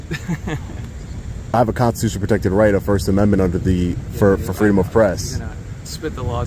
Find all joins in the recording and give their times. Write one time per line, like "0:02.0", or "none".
0:01.5

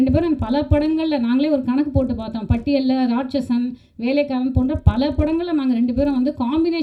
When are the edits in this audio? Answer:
none

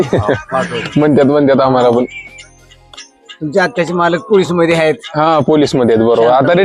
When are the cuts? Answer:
none

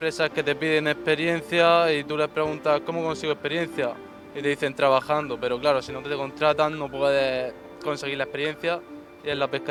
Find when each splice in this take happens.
none

